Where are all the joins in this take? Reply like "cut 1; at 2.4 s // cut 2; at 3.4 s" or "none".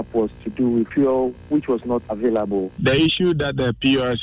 cut 1; at 0.9 s // cut 2; at 2.2 s